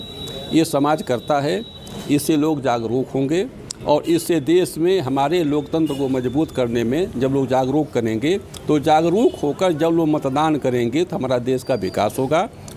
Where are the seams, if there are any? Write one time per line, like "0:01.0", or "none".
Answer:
none